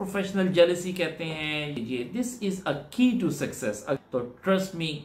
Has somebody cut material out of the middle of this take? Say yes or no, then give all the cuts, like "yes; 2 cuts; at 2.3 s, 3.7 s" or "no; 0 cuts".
yes; 2 cuts; at 1.7 s, 4.0 s